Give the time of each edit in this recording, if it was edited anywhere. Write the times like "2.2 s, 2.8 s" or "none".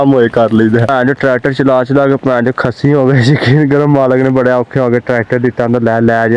0.9 s